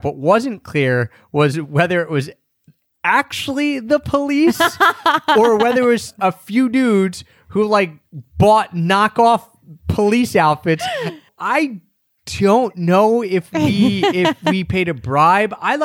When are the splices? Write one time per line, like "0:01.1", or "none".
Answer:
0:06.1
0:11.3